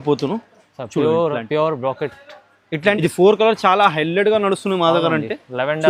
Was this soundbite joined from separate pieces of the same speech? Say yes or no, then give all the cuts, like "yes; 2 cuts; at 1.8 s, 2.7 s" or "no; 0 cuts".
yes; 1 cut; at 3.0 s